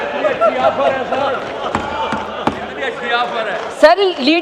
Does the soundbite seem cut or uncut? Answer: uncut